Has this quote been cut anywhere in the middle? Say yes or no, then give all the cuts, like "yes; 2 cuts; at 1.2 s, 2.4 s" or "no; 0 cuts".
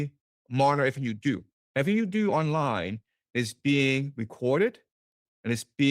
yes; 1 cut; at 1.6 s